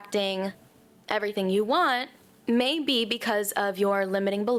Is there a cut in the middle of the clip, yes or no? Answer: no